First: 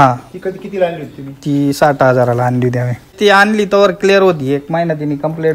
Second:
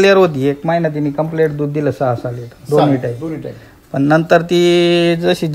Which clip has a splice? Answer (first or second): first